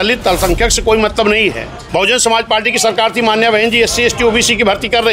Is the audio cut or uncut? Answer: cut